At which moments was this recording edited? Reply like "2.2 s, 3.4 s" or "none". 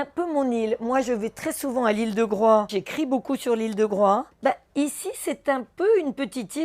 2.8 s, 4.3 s

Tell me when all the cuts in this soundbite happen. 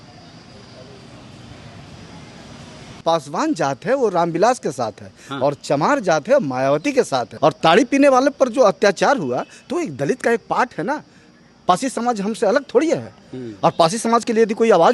2.9 s, 7.3 s

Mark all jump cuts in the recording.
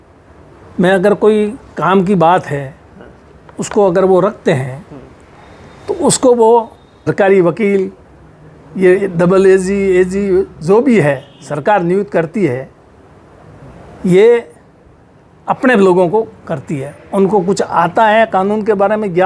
7.1 s

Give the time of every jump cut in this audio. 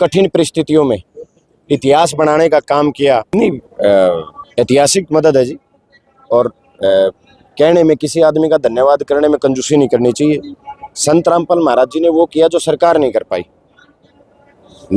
3.3 s

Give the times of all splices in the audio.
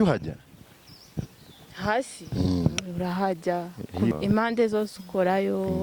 4.1 s

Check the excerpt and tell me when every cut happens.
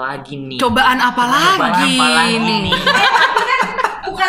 2.7 s

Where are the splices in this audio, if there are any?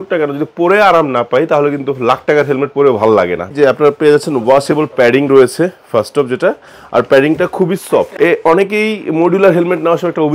3.5 s, 8.1 s

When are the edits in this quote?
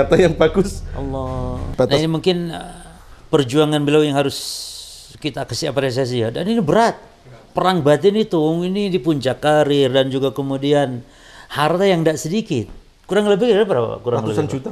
1.7 s

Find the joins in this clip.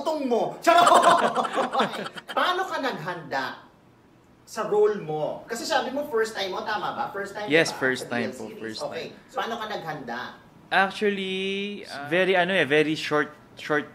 2.2 s, 9.2 s, 11.8 s

